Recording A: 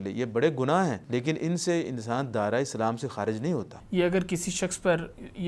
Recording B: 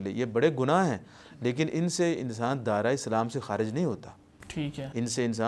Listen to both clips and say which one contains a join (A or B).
A